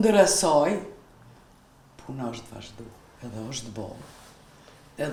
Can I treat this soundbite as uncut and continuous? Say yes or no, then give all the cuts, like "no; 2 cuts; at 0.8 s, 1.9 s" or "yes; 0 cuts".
yes; 0 cuts